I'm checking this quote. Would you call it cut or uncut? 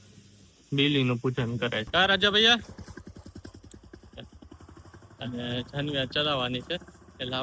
cut